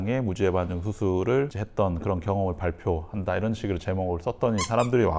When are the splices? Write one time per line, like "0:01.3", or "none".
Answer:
0:01.6